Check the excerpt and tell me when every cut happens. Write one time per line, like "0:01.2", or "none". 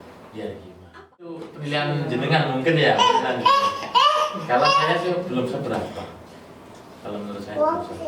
0:01.2